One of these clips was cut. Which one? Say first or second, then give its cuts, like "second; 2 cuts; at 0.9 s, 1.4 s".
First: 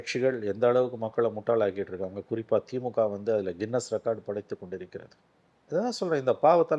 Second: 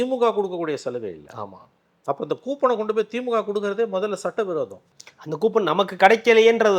second; 1 cut; at 4.8 s